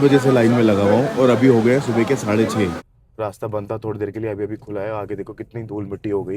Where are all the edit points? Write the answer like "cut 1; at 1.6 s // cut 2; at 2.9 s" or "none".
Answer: cut 1; at 2.8 s